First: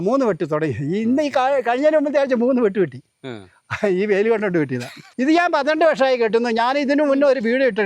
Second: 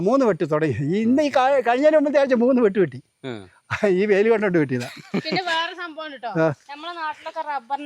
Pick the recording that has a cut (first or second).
first